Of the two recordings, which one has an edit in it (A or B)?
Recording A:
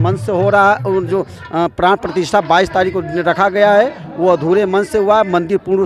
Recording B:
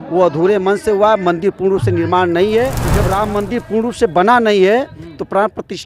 B